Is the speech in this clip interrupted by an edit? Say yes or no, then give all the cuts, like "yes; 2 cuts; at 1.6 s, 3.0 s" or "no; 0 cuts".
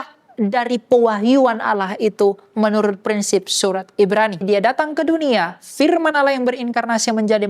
yes; 1 cut; at 4.4 s